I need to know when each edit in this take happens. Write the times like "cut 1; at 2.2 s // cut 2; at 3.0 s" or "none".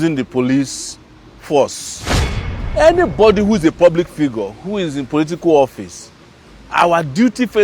cut 1; at 2.4 s